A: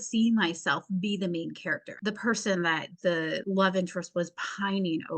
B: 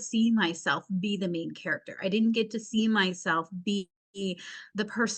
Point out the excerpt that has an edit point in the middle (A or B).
A